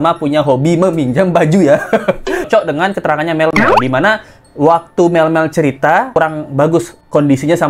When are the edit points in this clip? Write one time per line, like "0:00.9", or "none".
0:02.5
0:06.1